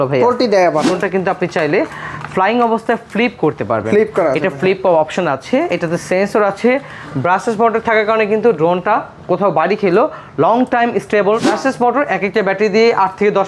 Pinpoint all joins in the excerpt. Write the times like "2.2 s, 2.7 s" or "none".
0.9 s, 11.5 s

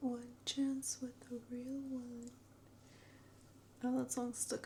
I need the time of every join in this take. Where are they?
none

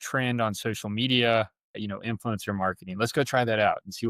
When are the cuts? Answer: 1.8 s

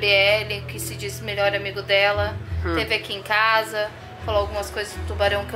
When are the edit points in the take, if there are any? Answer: none

